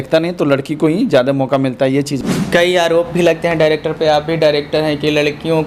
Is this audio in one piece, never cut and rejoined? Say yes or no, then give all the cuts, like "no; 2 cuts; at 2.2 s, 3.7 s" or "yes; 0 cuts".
no; 1 cut; at 2.1 s